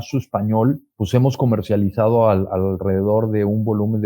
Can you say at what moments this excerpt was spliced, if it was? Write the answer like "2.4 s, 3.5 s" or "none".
0.9 s